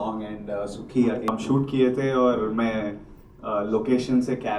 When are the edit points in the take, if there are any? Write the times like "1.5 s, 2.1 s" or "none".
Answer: 1.3 s